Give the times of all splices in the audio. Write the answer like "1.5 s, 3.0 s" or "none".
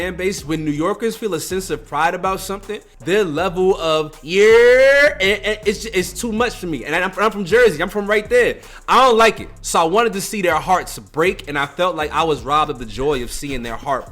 2.9 s